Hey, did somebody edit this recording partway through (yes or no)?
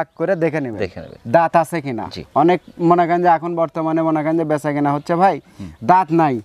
no